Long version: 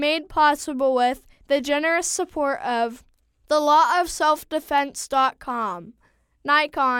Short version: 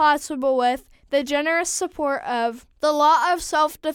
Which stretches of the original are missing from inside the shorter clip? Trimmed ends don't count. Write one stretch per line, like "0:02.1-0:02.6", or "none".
0:03.0-0:03.3